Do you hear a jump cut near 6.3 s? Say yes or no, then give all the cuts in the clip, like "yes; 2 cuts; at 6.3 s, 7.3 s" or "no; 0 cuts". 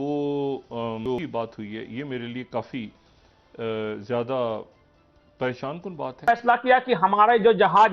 yes; 2 cuts; at 1.1 s, 6.3 s